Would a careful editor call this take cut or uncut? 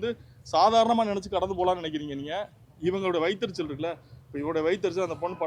uncut